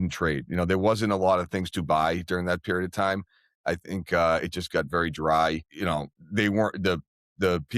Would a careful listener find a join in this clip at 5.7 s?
yes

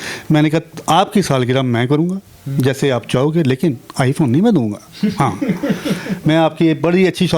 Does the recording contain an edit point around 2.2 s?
no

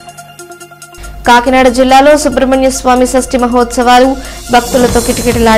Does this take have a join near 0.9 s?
yes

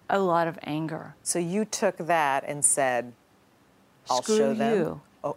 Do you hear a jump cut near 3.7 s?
no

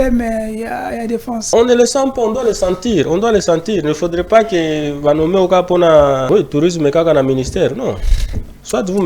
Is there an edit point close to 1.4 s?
yes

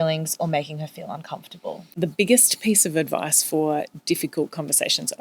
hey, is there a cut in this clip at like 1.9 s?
yes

